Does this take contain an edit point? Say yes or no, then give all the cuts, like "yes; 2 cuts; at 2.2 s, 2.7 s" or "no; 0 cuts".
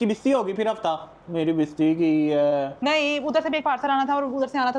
no; 0 cuts